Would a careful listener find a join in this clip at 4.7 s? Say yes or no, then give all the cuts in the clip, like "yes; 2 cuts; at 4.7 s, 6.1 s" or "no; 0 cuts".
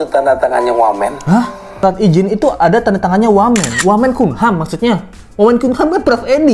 no; 1 cut; at 1.8 s